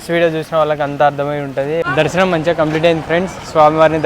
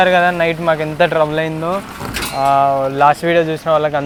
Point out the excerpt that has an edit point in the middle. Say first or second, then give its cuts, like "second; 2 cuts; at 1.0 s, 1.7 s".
first; 1 cut; at 1.8 s